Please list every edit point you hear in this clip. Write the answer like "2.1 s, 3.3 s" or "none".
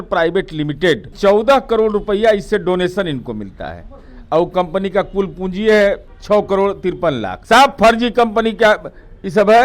1.1 s, 6.1 s, 7.3 s